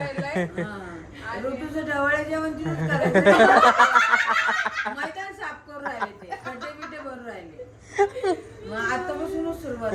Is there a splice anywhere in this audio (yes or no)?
no